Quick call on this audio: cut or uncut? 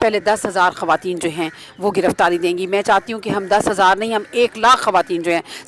uncut